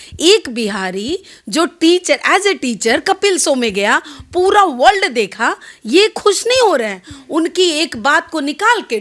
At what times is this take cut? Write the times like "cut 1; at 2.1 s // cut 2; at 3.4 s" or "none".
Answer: none